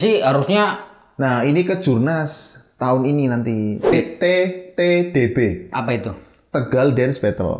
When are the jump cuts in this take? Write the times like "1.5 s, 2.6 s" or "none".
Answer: 3.9 s